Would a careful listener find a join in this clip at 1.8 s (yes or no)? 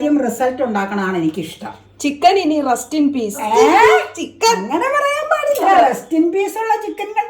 no